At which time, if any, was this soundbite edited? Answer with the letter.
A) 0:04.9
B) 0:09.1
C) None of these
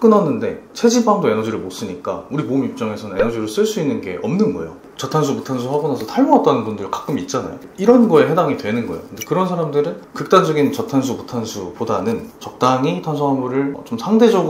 A